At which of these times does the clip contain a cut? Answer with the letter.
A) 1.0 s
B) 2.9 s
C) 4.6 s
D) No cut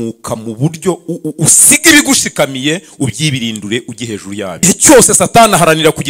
C